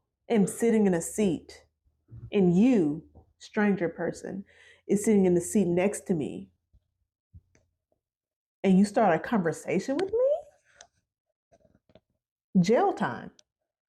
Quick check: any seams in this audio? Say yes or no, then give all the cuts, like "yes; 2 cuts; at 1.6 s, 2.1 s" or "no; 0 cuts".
no; 0 cuts